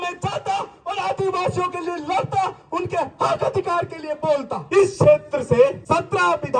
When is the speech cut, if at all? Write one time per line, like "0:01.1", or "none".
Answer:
0:04.6
0:05.8